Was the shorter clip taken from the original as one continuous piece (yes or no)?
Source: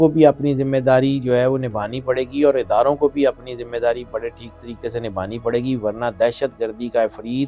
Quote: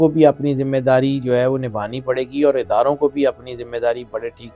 yes